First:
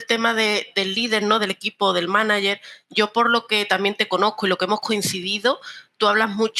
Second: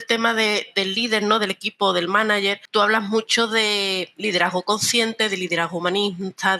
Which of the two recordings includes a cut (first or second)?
second